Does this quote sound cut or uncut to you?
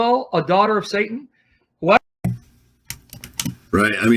uncut